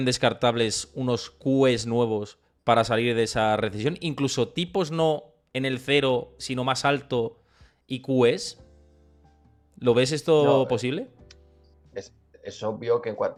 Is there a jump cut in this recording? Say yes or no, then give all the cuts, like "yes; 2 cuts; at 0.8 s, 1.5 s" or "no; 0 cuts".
no; 0 cuts